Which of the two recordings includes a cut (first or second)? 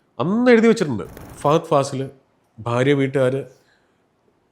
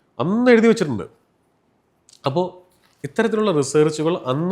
first